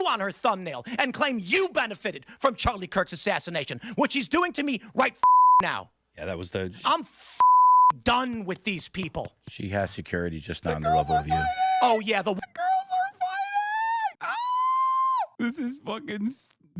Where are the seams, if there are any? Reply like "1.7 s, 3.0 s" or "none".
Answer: 14.3 s, 15.2 s